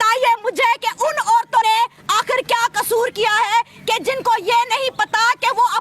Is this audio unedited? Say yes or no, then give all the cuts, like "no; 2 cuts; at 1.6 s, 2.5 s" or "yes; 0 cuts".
no; 1 cut; at 1.6 s